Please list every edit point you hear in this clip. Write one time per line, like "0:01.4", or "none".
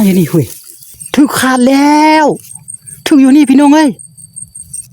0:01.0